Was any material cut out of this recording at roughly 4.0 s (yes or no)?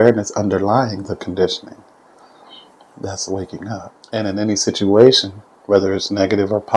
yes